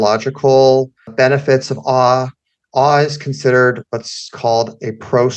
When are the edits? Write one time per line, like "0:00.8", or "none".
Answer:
0:01.0